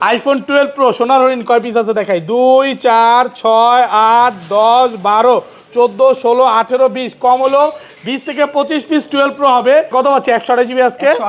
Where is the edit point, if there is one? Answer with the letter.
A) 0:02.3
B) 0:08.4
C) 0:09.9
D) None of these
C